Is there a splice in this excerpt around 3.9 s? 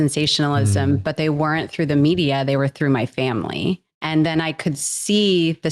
yes; 1 cut; at 3.9 s

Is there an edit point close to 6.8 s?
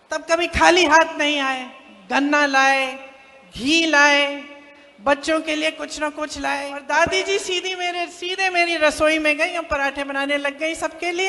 yes; 1 cut; at 6.8 s

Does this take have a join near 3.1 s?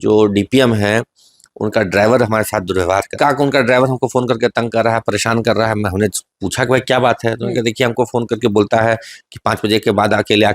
yes; 1 cut; at 3.1 s

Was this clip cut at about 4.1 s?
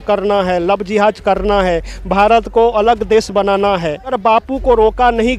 yes; 1 cut; at 4.1 s

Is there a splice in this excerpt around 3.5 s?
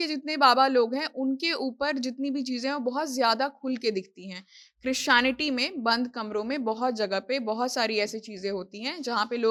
no; 0 cuts

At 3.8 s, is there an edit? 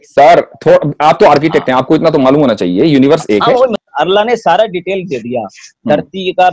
yes; 1 cut; at 3.8 s

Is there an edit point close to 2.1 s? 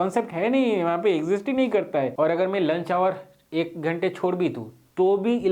yes; 1 cut; at 2.1 s

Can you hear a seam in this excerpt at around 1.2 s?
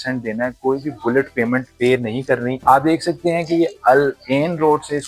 no; 1 cut; at 2.6 s

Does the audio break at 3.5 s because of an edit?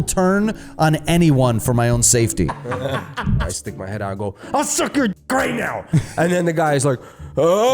yes; 1 cut; at 3.5 s

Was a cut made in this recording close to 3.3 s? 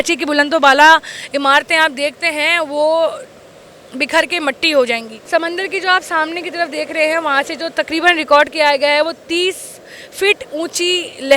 no; 0 cuts

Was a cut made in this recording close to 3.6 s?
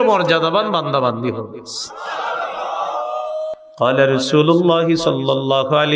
yes; 1 cut; at 3.6 s

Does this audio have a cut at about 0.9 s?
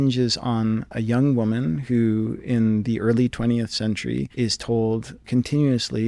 yes; 3 cuts; at 0.9 s, 4.3 s, 5.2 s

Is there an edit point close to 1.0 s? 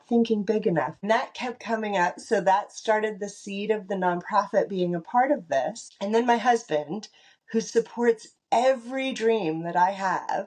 yes; 2 cuts; at 1.0 s, 5.9 s

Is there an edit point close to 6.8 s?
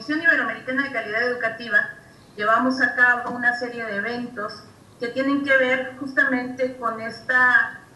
no; 1 cut; at 1.2 s

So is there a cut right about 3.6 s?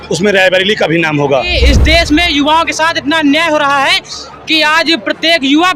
no; 1 cut; at 1.5 s

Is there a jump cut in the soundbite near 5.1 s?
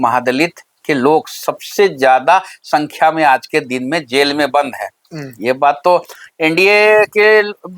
no; 0 cuts

